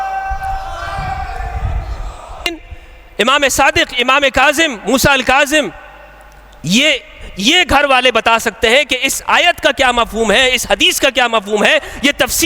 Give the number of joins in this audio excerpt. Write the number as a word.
one